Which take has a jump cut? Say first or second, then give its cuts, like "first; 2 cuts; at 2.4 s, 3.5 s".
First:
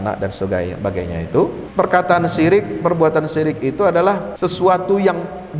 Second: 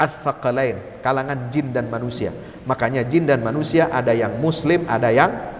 first; 2 cuts; at 1.6 s, 4.3 s